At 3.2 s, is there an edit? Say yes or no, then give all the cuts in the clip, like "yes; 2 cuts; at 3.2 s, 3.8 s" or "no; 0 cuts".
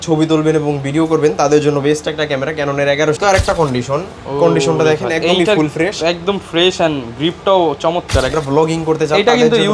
yes; 2 cuts; at 3.2 s, 8.3 s